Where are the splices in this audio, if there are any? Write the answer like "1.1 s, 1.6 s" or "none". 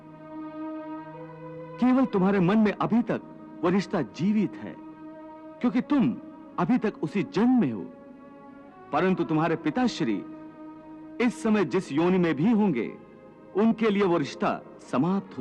none